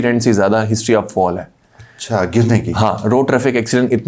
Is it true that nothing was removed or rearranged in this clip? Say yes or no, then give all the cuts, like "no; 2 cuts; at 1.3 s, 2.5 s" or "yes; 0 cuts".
yes; 0 cuts